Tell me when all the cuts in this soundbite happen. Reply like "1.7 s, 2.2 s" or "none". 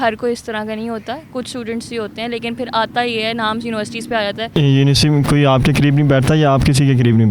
4.5 s